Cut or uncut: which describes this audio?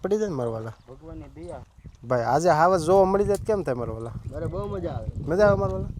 cut